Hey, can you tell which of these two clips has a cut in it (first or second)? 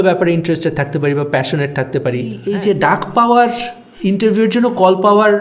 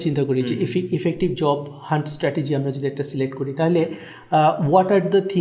first